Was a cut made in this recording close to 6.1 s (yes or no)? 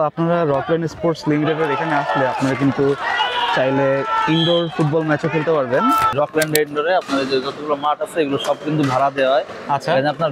yes